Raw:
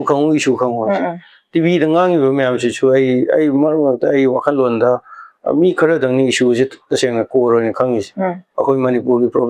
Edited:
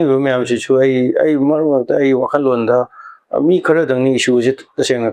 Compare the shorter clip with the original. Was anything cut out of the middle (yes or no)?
no